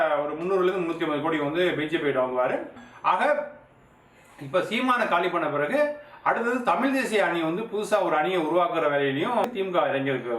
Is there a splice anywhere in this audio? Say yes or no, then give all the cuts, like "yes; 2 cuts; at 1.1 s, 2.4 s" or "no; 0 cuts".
yes; 2 cuts; at 2.8 s, 9.4 s